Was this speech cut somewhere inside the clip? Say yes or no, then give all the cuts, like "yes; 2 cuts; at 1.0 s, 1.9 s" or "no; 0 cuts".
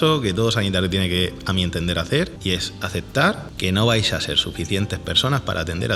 yes; 2 cuts; at 2.4 s, 3.5 s